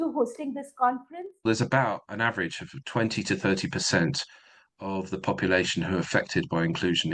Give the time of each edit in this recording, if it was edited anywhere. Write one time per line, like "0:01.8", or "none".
0:01.4